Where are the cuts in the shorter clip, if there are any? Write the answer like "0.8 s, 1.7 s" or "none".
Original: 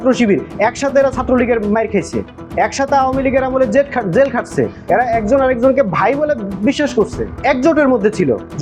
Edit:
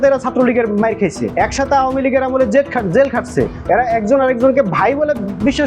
1.2 s